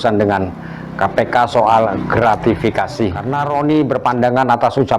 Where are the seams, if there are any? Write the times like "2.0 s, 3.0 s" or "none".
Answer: 3.2 s